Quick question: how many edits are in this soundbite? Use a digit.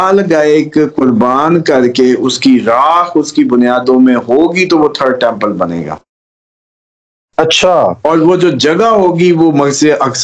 0